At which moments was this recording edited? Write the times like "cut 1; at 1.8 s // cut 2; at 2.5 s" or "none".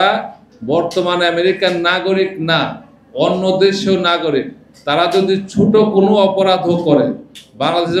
none